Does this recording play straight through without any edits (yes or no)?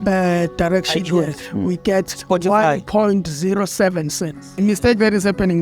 no